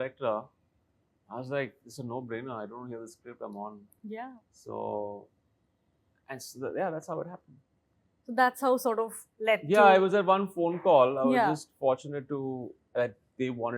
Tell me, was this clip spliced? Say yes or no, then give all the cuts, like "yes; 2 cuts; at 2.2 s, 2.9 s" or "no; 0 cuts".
no; 0 cuts